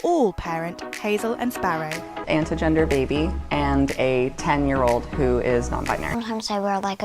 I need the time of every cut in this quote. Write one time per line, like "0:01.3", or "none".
0:02.2
0:06.0

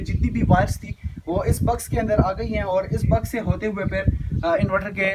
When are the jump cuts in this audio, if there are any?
none

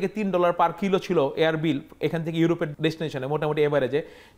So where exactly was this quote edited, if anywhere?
0:02.7

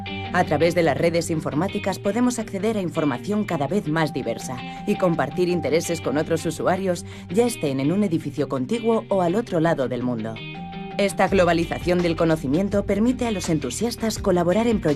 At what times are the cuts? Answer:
0:06.4

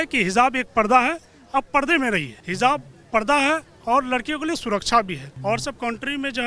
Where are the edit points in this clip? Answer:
0:02.4
0:05.3

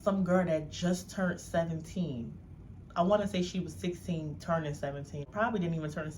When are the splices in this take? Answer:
0:05.3

